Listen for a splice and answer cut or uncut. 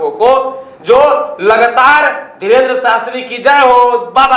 uncut